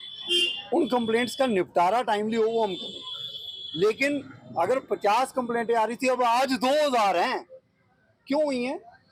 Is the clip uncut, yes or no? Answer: yes